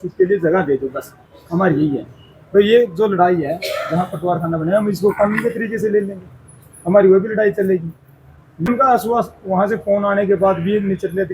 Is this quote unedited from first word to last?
no; 1 cut; at 8.7 s

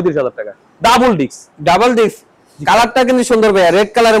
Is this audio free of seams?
yes; 0 cuts

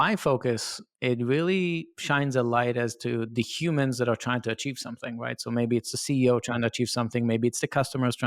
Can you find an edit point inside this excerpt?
no; 0 cuts

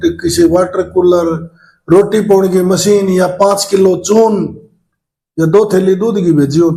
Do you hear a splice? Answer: no; 0 cuts

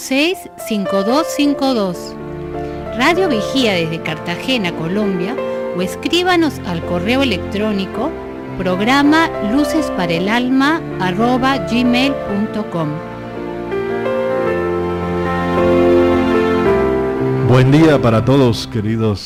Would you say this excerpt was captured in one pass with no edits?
yes; 0 cuts

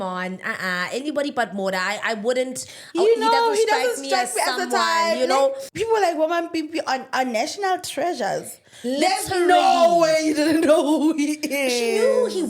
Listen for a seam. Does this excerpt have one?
yes; 1 cut; at 5.6 s

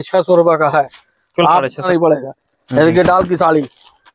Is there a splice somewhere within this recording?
yes; 1 cut; at 1.9 s

